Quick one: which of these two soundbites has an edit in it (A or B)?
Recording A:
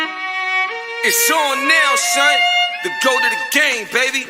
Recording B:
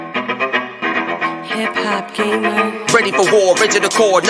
B